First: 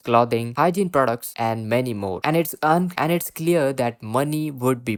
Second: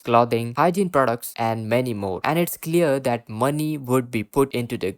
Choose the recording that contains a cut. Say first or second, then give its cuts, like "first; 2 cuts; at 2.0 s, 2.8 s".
second; 1 cut; at 2.2 s